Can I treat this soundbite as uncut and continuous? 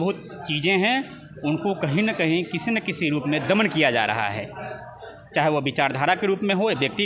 yes; 0 cuts

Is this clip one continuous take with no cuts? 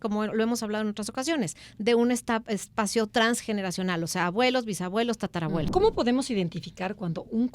no; 1 cut; at 5.7 s

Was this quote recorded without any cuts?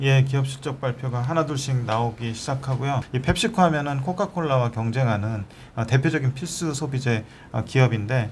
no; 1 cut; at 3.1 s

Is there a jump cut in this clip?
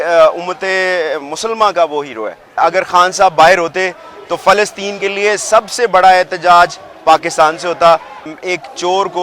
yes; 2 cuts; at 2.6 s, 8.1 s

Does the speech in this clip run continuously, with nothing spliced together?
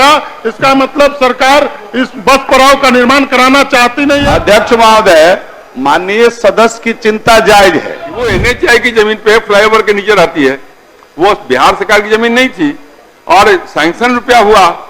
no; 2 cuts; at 4.2 s, 8.1 s

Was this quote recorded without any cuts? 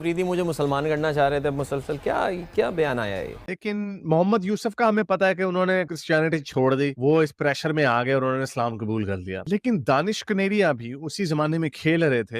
no; 1 cut; at 3.5 s

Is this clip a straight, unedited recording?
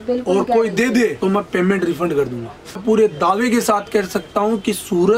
no; 1 cut; at 2.8 s

